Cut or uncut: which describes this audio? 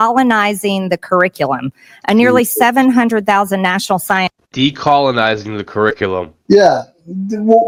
uncut